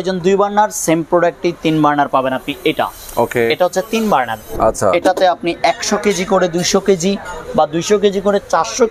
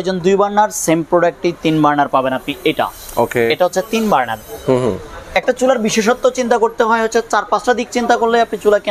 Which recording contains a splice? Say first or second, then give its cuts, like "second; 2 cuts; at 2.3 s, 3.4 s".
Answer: first; 1 cut; at 4.5 s